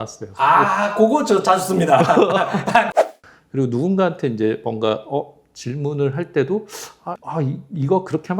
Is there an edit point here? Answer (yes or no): yes